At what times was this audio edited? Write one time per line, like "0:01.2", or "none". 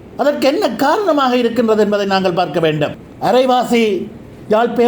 0:03.1